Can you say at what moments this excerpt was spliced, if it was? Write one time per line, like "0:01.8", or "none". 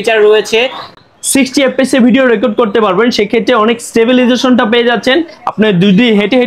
none

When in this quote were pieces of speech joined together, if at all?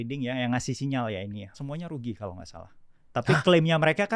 0:01.6

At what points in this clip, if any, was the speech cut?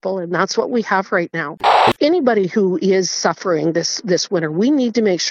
0:01.5

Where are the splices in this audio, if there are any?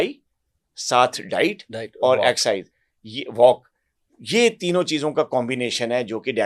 none

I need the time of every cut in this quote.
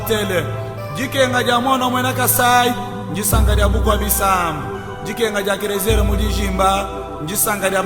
none

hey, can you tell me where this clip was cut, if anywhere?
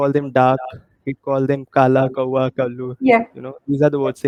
none

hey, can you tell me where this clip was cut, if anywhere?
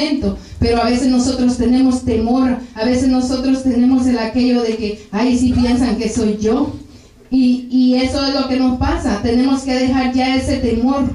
none

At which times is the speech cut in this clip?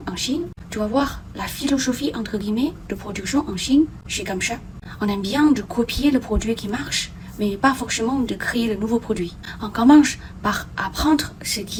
none

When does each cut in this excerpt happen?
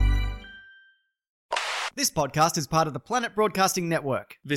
0:01.6

